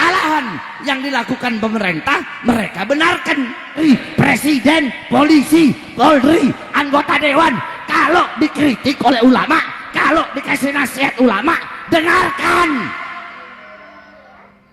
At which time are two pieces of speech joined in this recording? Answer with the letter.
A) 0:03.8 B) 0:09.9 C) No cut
A